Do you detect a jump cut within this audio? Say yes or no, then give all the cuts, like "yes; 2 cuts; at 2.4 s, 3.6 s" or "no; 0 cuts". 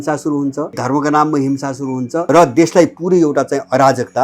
yes; 2 cuts; at 0.8 s, 2.2 s